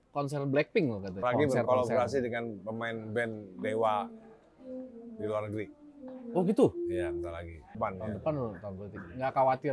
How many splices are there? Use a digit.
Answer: 2